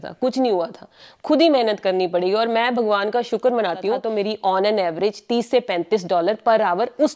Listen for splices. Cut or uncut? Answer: cut